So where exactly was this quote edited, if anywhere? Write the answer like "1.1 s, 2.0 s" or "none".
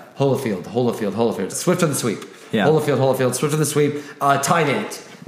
1.5 s